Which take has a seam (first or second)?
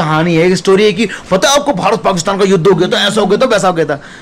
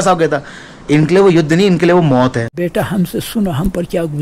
second